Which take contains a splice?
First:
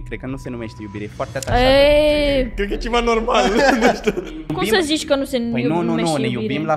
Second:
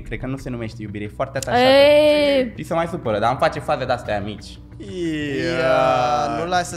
second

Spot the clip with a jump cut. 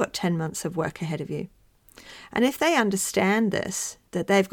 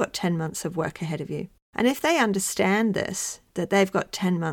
second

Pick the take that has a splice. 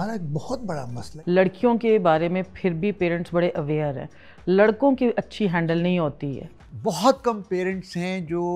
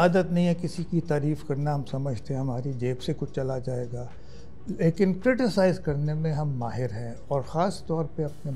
first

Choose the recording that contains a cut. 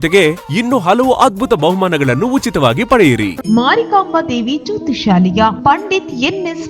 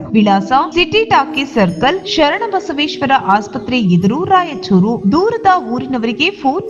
first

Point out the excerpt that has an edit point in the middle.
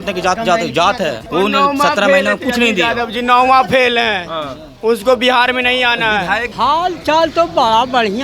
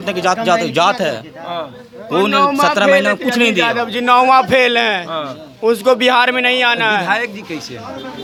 first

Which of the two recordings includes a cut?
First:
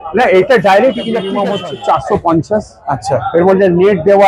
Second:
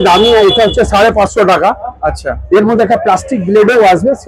first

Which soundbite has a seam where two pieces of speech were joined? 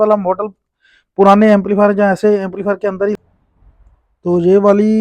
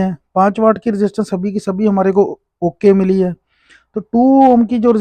first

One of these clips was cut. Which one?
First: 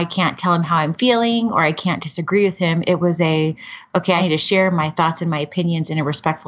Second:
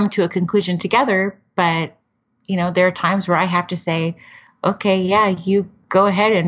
first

